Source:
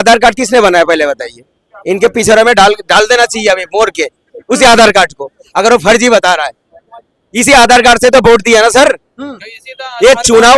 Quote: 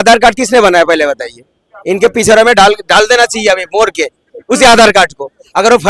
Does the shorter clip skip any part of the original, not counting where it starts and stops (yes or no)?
no